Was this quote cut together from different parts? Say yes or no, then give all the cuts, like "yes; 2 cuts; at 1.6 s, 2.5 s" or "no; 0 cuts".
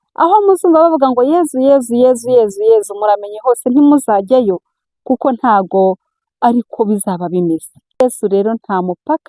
yes; 1 cut; at 8.0 s